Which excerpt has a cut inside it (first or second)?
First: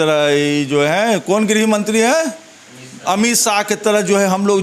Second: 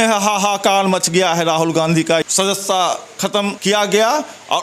second